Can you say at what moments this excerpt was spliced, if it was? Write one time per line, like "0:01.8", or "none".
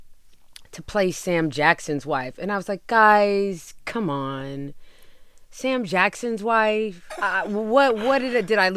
0:07.1

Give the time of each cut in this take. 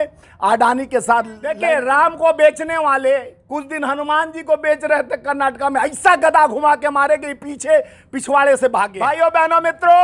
0:01.6
0:09.1

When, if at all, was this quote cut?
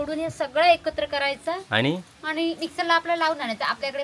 none

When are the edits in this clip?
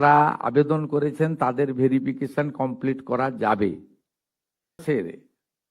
0:04.8

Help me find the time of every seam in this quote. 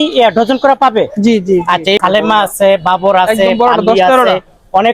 0:02.0

